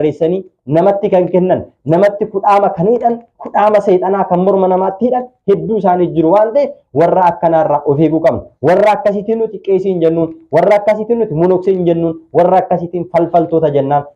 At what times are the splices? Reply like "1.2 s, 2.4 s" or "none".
none